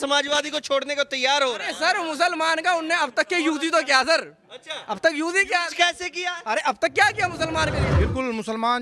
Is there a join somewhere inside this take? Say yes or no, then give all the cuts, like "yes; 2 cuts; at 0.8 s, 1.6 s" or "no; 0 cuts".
yes; 1 cut; at 7.8 s